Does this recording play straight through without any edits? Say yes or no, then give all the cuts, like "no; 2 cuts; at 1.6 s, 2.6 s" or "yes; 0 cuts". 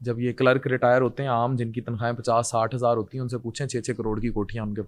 yes; 0 cuts